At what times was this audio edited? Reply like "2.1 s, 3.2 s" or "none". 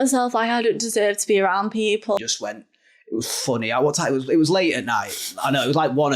2.2 s